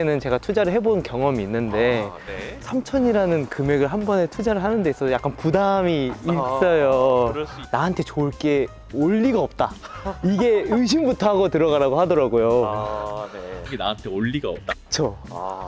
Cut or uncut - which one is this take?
uncut